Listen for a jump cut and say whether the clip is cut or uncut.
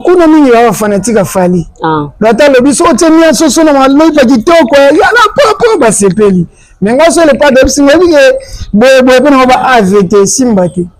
uncut